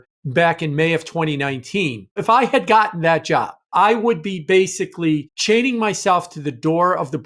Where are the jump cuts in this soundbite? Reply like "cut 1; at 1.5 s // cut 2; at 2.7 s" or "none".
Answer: cut 1; at 2.2 s // cut 2; at 3.6 s // cut 3; at 5.3 s

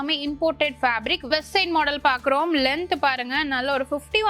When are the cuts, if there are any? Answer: cut 1; at 1.2 s

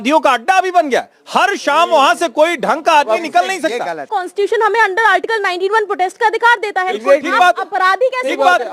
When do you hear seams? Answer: cut 1; at 4.1 s

